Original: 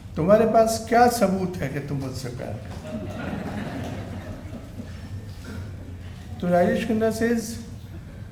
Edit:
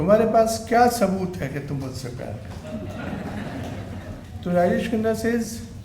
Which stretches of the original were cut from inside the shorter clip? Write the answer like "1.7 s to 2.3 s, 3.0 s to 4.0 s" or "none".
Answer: 4.4 s to 6.2 s